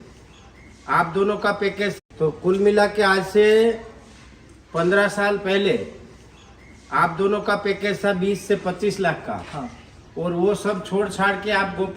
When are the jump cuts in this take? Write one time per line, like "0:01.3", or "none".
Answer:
0:01.9